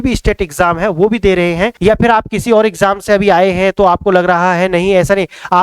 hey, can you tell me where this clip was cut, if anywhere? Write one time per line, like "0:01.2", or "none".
0:01.7